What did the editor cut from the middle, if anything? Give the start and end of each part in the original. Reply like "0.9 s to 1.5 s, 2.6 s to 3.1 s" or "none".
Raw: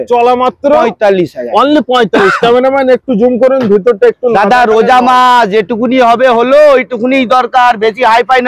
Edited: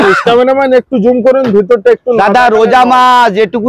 none